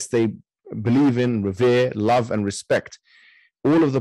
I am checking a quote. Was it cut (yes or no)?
no